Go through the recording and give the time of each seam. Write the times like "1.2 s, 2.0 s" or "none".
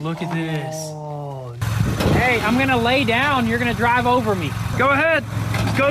1.6 s